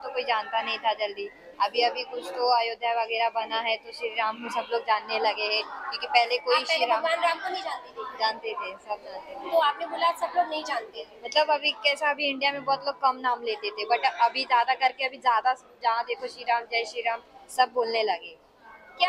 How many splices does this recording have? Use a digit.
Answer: 0